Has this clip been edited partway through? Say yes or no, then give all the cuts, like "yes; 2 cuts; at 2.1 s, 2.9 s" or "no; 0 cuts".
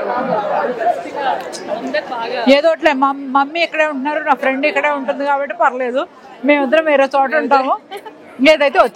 no; 0 cuts